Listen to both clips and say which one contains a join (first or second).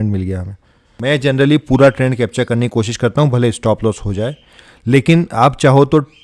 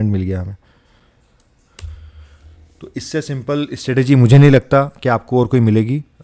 first